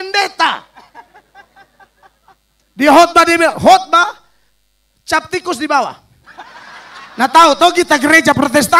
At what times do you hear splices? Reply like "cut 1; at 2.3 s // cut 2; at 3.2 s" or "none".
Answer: none